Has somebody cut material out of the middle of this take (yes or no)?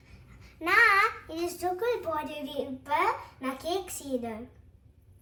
no